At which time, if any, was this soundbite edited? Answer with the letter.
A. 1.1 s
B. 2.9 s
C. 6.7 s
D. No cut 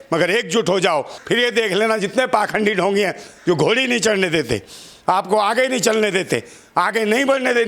A